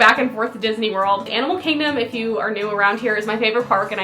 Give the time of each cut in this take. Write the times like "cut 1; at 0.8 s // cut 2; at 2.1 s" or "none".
cut 1; at 1.3 s